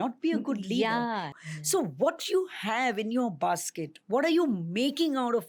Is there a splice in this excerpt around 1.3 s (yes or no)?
yes